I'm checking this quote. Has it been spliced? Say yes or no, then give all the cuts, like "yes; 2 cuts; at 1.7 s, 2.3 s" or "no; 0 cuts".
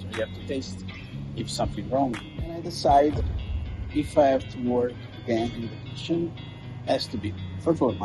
yes; 1 cut; at 2.6 s